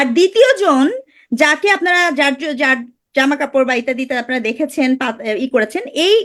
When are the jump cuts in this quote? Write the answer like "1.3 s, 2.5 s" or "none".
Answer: none

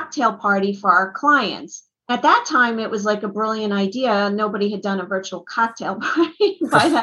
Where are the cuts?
2.1 s

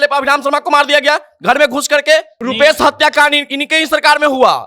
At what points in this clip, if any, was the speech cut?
2.3 s

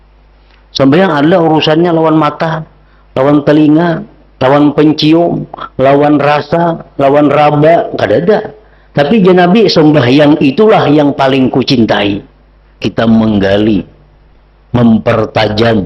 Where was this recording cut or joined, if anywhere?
12.8 s

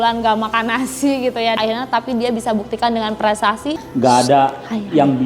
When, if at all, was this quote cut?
3.8 s

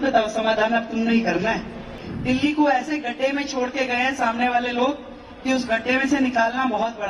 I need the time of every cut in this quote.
2.0 s

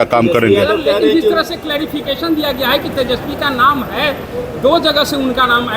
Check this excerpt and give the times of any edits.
none

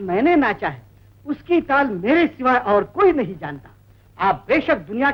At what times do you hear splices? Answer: none

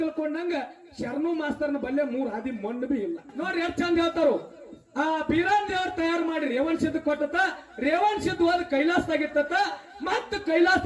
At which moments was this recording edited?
3.3 s

